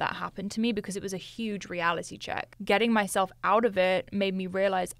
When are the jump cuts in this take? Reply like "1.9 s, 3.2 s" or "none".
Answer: 2.5 s